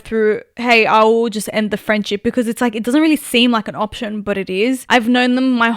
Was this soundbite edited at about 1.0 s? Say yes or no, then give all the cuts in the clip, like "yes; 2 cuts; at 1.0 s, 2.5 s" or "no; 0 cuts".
no; 1 cut; at 4.8 s